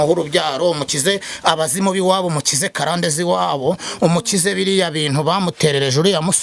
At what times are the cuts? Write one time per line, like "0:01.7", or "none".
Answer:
none